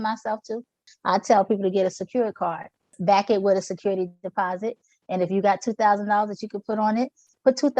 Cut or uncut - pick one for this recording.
cut